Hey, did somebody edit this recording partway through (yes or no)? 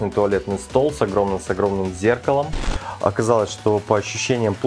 yes